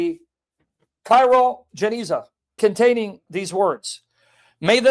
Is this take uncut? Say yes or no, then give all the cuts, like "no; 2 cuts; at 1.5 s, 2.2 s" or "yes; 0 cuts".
no; 1 cut; at 2.4 s